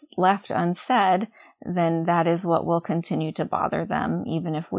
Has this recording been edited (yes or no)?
no